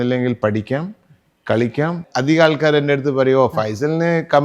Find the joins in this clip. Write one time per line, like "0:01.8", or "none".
0:02.0